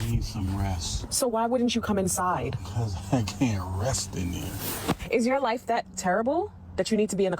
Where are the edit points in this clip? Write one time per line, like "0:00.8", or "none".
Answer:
0:01.0
0:05.0